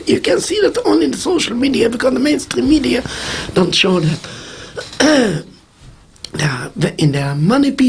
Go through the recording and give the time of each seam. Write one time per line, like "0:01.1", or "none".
none